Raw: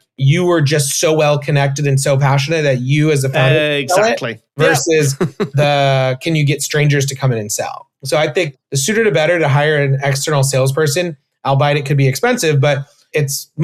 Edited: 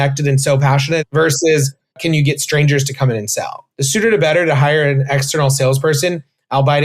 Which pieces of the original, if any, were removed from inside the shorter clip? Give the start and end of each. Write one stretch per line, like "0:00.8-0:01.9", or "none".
0:02.6-0:04.5
0:05.4-0:06.2
0:07.9-0:08.6